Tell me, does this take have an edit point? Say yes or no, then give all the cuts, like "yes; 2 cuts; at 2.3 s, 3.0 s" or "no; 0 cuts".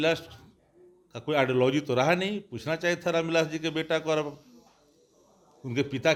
no; 0 cuts